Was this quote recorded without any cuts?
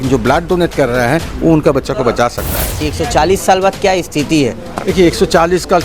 no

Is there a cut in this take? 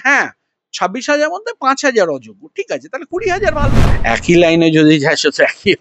yes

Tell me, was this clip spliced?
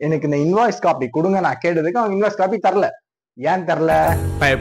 no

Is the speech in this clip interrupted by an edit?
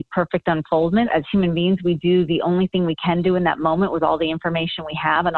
no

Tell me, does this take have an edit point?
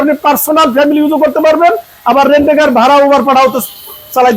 no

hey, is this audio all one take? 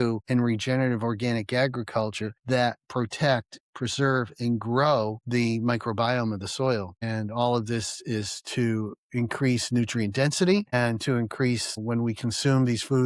yes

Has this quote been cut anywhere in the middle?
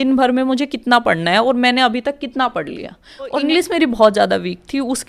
yes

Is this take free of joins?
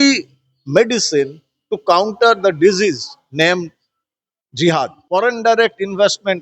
no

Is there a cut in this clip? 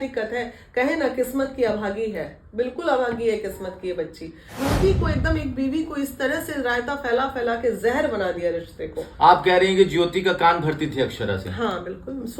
yes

